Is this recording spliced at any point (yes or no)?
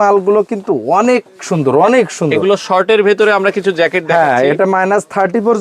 no